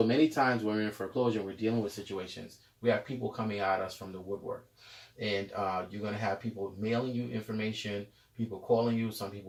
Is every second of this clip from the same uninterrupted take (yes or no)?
yes